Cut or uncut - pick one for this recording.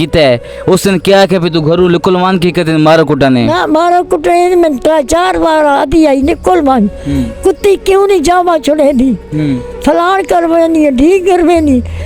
uncut